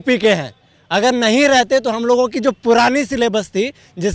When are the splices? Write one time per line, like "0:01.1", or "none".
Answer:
none